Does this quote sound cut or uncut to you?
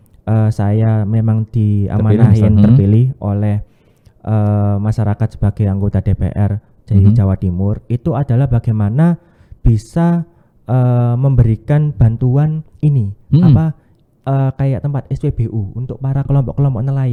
uncut